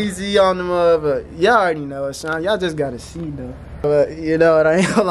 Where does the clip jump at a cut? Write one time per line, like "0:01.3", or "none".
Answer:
0:03.9

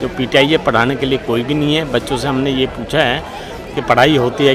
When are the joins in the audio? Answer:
none

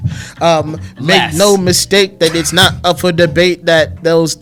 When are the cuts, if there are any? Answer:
none

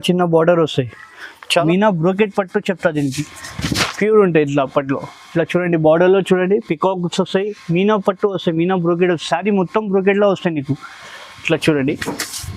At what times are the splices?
0:01.5

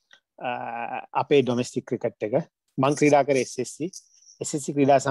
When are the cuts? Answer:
none

